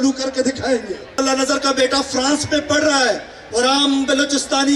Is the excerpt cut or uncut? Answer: cut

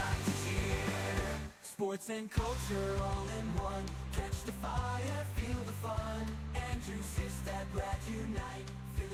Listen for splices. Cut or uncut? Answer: uncut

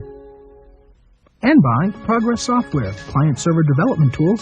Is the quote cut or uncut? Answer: cut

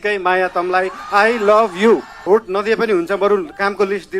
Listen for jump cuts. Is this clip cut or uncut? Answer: cut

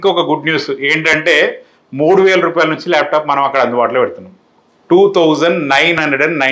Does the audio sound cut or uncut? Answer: uncut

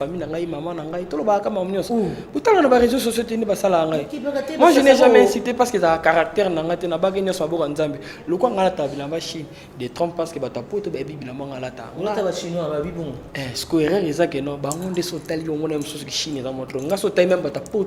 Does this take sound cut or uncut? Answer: uncut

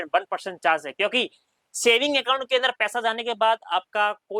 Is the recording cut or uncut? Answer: uncut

